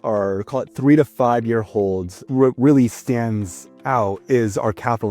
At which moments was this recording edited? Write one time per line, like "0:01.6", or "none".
0:02.3